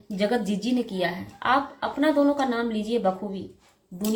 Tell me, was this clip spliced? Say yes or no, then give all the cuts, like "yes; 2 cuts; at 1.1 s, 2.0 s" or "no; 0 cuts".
no; 0 cuts